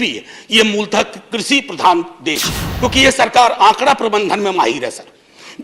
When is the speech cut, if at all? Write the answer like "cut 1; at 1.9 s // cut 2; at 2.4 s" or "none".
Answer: cut 1; at 2.6 s